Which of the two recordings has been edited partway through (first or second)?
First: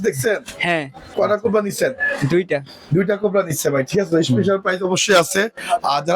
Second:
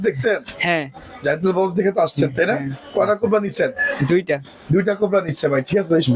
first